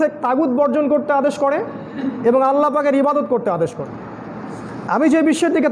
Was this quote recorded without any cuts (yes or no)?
no